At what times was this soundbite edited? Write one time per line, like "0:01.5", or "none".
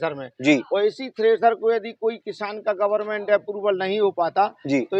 none